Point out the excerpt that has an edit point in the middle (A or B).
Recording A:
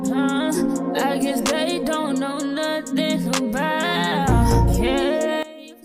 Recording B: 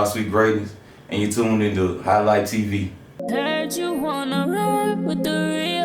B